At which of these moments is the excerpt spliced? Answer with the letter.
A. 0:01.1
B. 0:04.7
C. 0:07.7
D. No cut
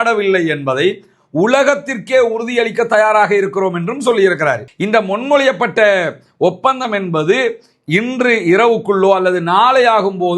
B